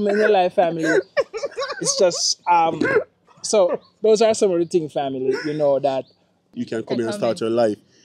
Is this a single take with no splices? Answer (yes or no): no